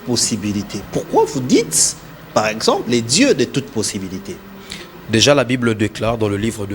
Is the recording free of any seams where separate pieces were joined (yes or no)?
yes